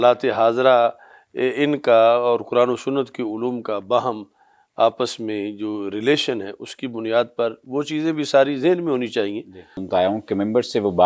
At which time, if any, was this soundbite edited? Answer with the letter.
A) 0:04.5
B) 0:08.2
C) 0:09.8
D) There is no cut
C